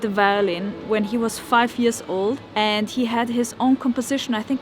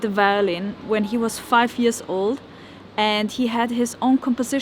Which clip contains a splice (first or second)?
first